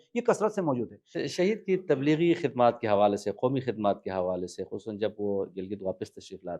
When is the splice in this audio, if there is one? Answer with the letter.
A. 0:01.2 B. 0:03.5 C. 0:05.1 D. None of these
A